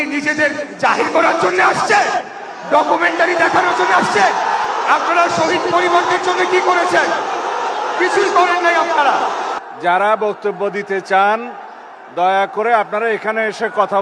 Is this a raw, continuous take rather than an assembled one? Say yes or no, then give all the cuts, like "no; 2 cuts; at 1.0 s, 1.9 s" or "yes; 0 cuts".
no; 2 cuts; at 4.6 s, 9.6 s